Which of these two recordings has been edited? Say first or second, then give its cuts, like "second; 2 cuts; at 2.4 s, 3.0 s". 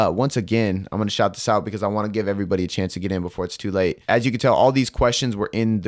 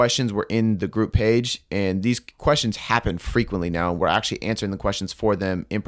first; 1 cut; at 4.0 s